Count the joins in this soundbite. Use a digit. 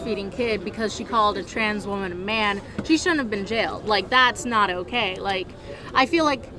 0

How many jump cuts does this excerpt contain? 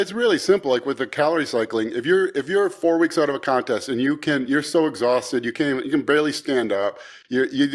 0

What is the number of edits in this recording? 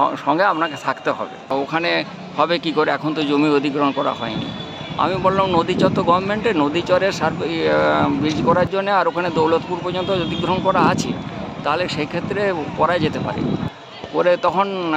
1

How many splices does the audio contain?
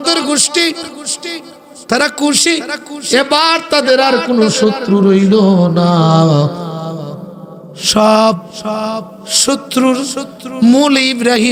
0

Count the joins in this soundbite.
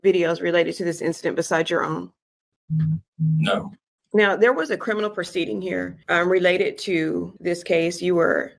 0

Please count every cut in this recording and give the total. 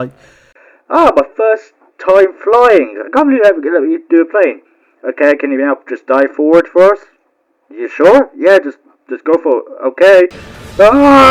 0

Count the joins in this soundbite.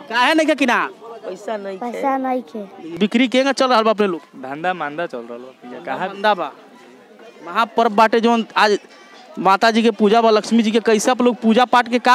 0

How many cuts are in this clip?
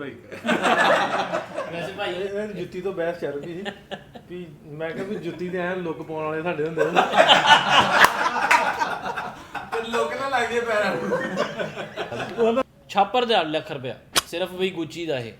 2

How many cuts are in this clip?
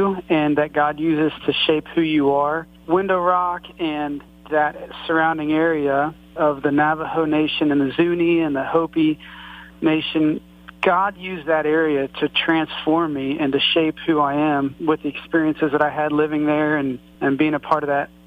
5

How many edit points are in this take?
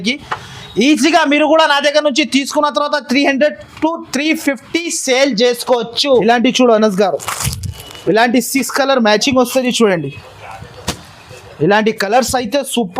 1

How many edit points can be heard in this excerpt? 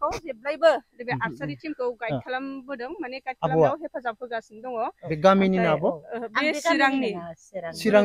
0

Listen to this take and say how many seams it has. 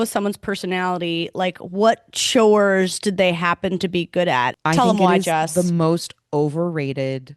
1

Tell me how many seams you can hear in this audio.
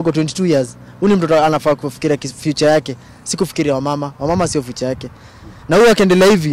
0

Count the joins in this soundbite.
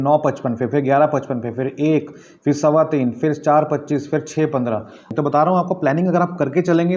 1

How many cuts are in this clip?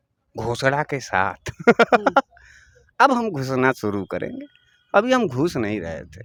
0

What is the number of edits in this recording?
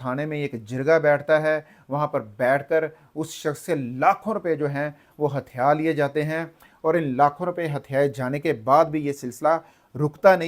0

